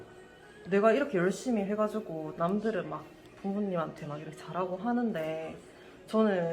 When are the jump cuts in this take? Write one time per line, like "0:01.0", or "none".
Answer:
none